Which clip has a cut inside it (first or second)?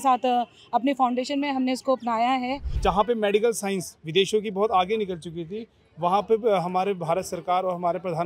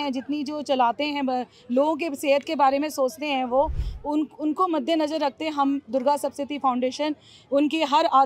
first